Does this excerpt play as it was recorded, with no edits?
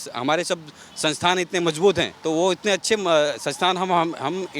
no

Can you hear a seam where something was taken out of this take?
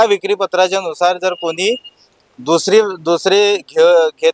no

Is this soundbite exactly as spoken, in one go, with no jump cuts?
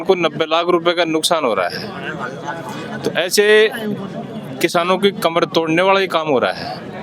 yes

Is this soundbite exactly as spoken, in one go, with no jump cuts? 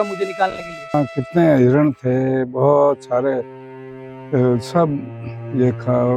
no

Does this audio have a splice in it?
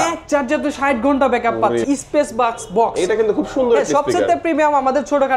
yes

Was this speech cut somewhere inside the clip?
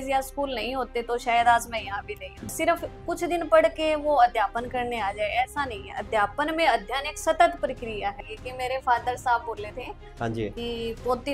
yes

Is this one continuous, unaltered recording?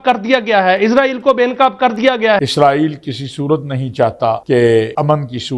yes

